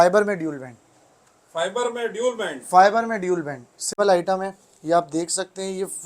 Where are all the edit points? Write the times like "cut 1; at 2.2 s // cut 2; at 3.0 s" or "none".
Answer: cut 1; at 3.9 s